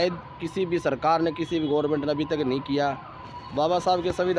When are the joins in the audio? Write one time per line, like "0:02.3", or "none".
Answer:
none